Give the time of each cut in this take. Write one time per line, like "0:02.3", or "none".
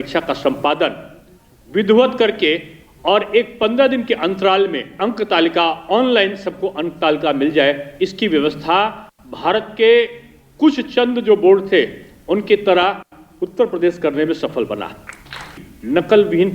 0:05.0
0:15.5